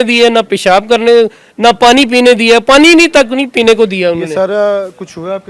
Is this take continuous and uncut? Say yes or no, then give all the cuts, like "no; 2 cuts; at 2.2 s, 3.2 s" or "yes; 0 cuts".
yes; 0 cuts